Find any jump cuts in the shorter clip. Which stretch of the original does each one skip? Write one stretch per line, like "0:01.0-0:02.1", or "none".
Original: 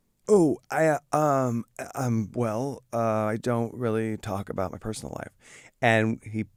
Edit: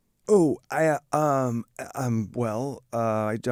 none

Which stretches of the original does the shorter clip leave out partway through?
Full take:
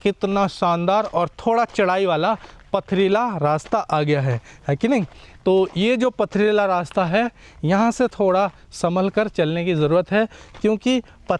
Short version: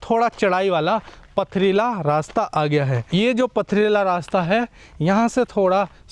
0:04.4-0:05.7

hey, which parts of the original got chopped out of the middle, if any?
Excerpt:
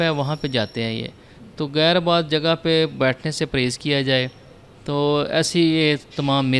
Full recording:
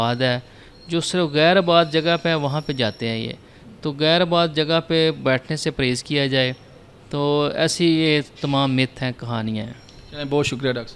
none

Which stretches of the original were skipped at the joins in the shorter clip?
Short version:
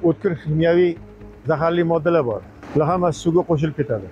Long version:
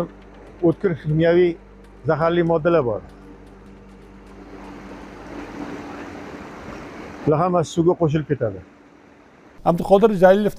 0:03.1-0:07.1

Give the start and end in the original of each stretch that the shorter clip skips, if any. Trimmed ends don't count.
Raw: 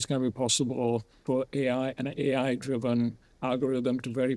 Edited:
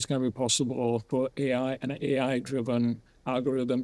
0:01.0-0:01.2

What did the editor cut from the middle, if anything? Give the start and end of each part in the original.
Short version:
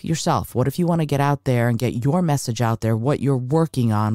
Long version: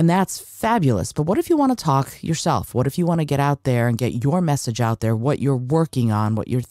none

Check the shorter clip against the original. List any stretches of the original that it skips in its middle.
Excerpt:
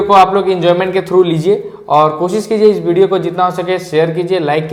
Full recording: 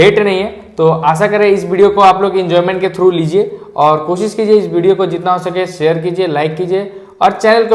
none

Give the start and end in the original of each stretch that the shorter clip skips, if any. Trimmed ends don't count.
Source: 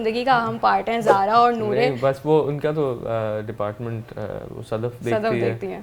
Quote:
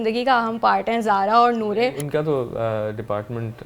0:02.0-0:02.5

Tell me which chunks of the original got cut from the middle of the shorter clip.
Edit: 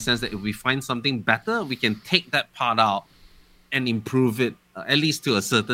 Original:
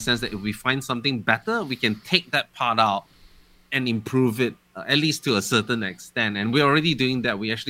none

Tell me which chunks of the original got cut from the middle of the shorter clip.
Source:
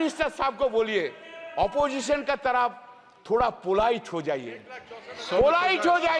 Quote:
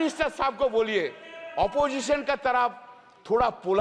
none

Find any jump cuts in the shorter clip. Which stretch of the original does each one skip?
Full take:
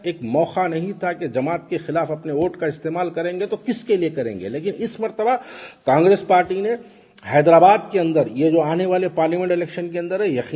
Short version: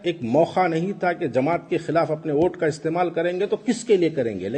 none

